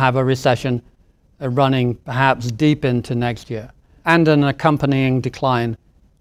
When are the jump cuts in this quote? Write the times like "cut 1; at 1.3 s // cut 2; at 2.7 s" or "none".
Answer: cut 1; at 4.0 s